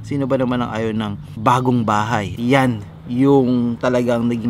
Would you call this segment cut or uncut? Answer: cut